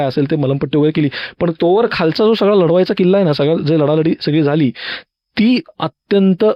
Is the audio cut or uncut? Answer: uncut